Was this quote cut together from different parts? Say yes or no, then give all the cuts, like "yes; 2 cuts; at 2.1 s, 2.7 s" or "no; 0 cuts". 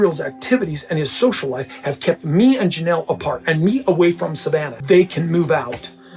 yes; 1 cut; at 4.7 s